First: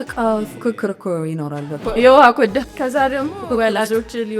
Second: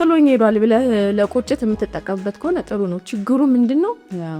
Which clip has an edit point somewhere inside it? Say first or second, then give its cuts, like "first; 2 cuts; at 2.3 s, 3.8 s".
first; 2 cuts; at 1.9 s, 2.7 s